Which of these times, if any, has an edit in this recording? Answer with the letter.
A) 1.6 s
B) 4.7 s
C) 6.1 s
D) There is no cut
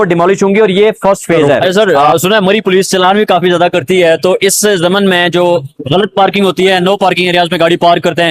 A